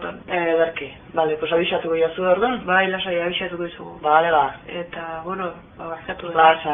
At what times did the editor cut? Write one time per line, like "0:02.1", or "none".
none